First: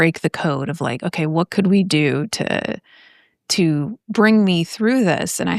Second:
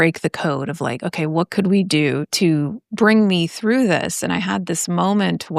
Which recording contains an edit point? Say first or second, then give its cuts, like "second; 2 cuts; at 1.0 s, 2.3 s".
second; 1 cut; at 2.3 s